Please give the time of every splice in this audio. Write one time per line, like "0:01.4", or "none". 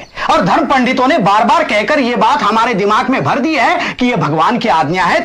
none